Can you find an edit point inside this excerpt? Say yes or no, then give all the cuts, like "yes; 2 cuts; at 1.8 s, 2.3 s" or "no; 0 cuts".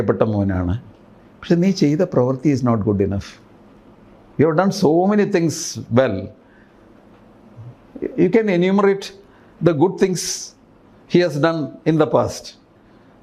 no; 0 cuts